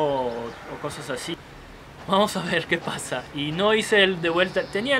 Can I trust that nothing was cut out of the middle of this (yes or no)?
no